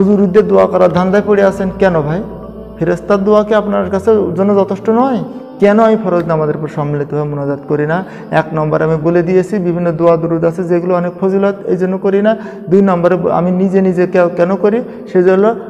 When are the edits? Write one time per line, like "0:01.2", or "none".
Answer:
0:05.4